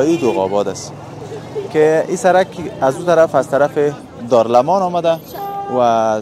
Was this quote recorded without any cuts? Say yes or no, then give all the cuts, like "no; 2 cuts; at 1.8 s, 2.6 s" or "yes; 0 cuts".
yes; 0 cuts